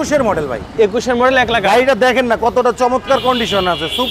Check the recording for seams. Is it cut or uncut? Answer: uncut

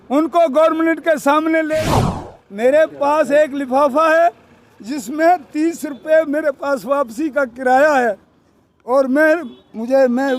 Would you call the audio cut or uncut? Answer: cut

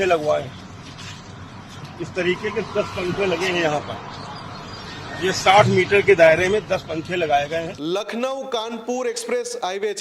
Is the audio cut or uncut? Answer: cut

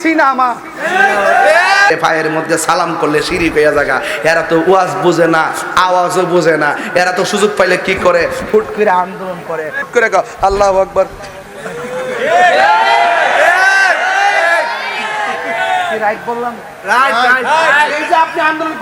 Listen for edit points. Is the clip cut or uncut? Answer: cut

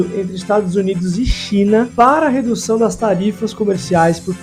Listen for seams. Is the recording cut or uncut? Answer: uncut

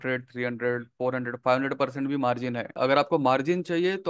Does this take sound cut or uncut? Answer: cut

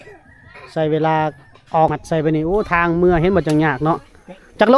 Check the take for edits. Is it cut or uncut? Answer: cut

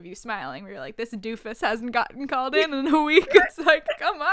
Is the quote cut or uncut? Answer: uncut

